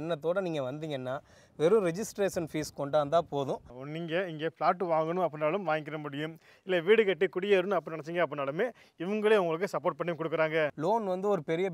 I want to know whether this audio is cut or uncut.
cut